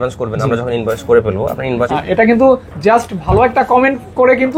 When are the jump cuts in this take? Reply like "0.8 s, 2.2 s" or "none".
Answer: 1.9 s